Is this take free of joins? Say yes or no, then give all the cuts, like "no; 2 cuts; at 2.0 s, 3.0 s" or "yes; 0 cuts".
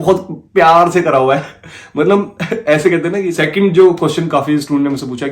no; 1 cut; at 3.3 s